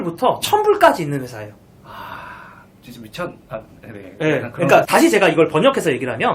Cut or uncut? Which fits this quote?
cut